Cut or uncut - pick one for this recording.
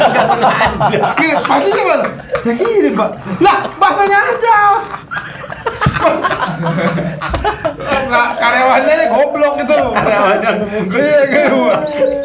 uncut